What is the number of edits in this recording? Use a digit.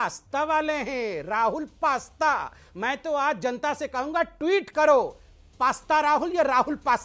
2